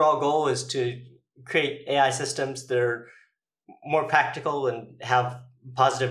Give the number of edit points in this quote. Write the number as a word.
zero